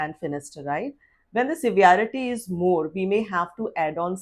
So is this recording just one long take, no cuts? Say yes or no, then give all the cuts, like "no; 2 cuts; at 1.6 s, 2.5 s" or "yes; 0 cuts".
no; 1 cut; at 1.1 s